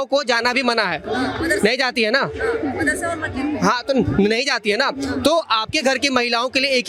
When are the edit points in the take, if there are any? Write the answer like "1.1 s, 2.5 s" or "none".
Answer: none